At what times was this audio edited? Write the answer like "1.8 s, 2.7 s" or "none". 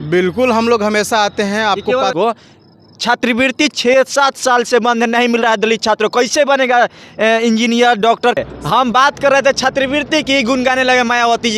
2.1 s, 8.4 s